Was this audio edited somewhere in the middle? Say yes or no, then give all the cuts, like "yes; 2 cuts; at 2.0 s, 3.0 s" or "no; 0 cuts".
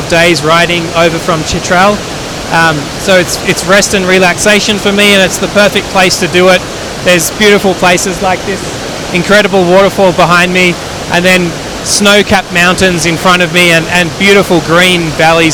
no; 0 cuts